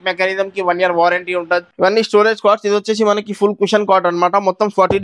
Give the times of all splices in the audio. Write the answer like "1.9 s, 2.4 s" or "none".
1.7 s